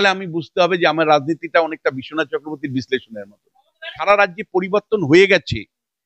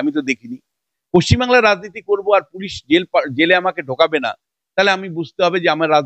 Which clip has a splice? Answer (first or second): first